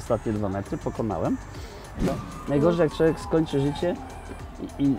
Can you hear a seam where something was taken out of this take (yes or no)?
yes